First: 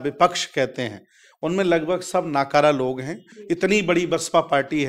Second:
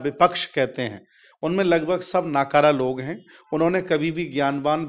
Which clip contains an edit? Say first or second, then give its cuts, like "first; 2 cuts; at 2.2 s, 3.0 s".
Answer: first; 1 cut; at 3.3 s